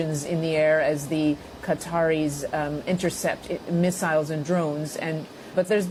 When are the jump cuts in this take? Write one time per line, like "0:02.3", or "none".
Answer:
none